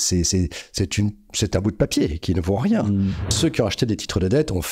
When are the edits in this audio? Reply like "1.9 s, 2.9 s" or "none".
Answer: 3.3 s

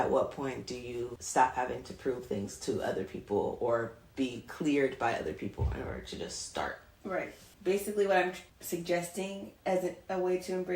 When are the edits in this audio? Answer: 1.2 s, 7.2 s, 8.5 s

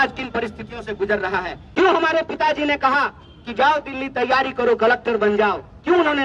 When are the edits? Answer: 1.6 s

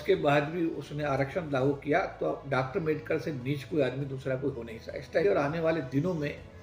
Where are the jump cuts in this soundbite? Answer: 5.2 s

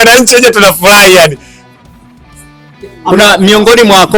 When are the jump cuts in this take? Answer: none

